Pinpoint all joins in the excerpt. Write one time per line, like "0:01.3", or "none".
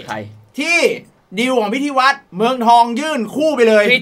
none